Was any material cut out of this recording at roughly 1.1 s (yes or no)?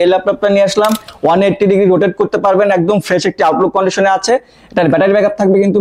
yes